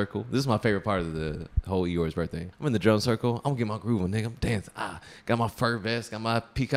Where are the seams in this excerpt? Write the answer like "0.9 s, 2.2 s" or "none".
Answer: 2.5 s